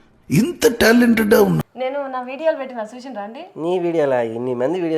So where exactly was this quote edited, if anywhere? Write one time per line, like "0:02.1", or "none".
0:01.6